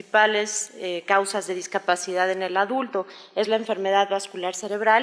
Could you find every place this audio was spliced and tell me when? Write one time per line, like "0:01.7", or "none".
none